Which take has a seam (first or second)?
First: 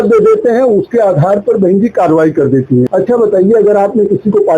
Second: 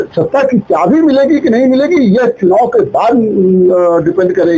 first